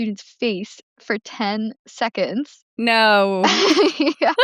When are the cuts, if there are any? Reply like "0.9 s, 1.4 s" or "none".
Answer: none